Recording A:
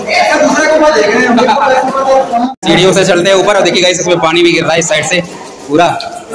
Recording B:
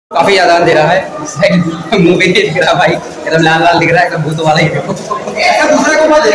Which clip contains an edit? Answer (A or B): A